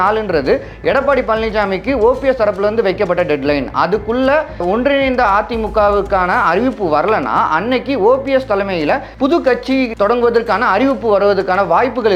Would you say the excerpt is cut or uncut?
cut